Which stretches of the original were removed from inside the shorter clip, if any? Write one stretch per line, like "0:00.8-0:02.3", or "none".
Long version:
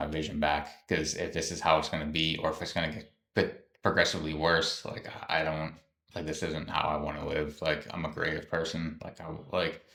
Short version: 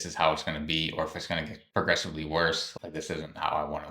0:03.0-0:03.7
0:04.8-0:06.1